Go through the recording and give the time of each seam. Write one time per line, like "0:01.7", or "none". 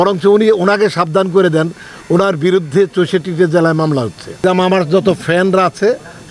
0:04.3